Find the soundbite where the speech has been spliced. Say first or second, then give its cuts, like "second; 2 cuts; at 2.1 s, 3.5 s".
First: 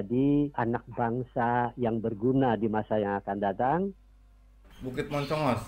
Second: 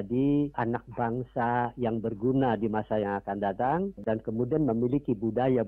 first; 1 cut; at 4.3 s